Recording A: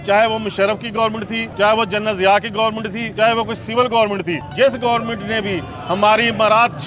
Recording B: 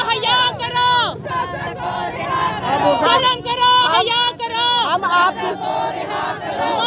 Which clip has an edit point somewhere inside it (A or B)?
A